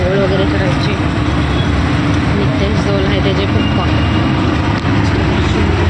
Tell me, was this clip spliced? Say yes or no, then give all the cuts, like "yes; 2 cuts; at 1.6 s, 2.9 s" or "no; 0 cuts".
no; 0 cuts